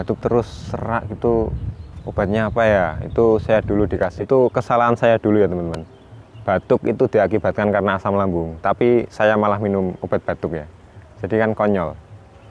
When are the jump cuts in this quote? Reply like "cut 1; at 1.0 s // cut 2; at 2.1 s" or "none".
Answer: cut 1; at 3.9 s